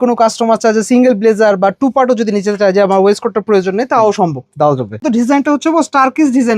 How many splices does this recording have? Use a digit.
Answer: 1